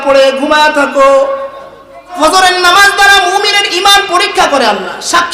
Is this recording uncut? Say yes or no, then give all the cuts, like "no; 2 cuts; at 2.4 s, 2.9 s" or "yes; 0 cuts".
no; 1 cut; at 2.1 s